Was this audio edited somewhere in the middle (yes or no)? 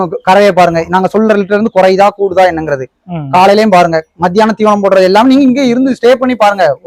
no